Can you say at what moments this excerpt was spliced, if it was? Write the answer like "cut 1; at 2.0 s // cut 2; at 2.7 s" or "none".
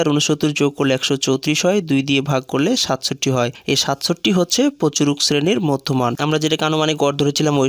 cut 1; at 6.2 s